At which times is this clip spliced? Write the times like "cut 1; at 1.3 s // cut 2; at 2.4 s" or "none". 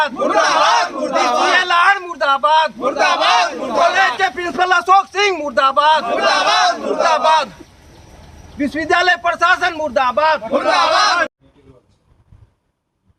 none